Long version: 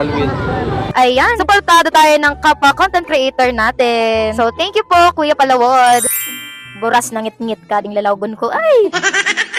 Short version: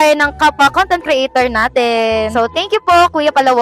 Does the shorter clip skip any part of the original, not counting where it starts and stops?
no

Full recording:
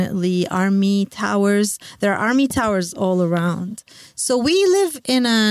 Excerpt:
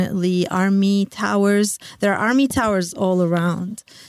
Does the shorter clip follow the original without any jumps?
yes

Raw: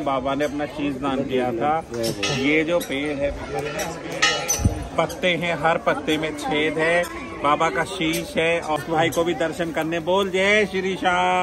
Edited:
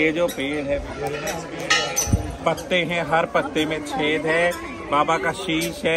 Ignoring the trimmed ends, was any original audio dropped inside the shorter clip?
no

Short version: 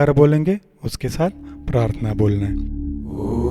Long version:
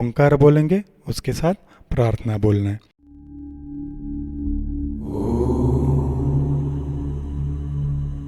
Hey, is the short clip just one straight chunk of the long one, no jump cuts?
no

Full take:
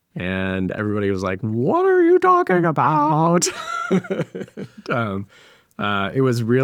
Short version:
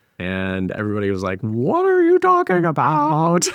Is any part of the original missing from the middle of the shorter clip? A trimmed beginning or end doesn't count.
no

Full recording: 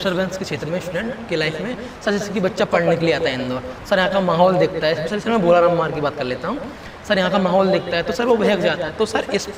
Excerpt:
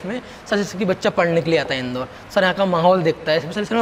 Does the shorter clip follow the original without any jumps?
yes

